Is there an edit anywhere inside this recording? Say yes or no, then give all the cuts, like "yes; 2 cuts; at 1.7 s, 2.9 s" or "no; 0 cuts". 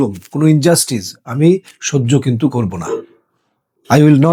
no; 0 cuts